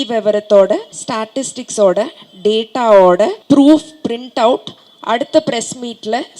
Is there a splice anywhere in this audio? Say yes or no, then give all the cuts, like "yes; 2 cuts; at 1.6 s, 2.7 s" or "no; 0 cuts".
yes; 2 cuts; at 1.0 s, 3.4 s